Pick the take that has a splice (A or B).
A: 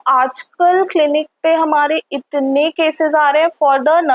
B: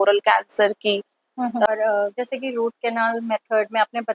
B